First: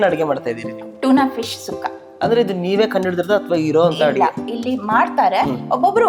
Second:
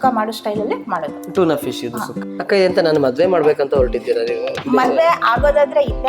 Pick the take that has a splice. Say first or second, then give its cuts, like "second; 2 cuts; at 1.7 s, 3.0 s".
second; 1 cut; at 2.3 s